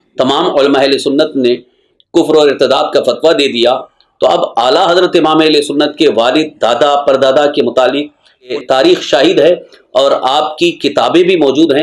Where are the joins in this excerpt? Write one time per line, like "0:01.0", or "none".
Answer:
0:08.5